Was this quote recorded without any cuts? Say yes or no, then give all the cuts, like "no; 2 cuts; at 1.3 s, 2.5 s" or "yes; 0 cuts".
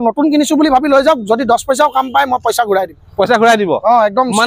yes; 0 cuts